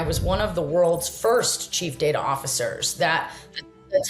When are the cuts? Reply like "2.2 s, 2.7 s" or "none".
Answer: none